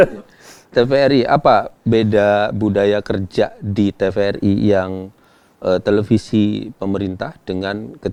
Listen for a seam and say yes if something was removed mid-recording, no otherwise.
no